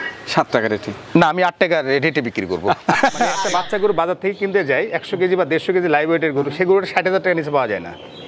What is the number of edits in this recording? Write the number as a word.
one